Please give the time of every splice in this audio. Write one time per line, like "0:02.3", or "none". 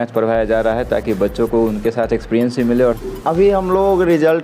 0:03.0